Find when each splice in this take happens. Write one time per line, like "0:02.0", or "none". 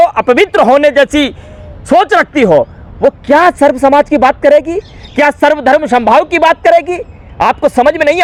none